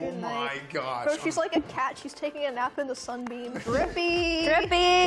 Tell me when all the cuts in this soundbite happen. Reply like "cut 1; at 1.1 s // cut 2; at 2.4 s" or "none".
cut 1; at 3.6 s